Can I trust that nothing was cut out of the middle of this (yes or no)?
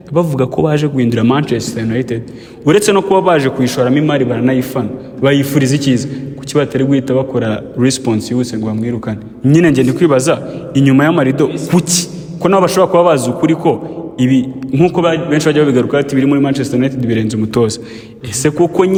yes